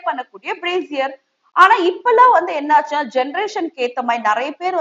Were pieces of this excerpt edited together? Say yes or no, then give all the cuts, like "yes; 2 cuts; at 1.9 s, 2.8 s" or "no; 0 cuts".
no; 0 cuts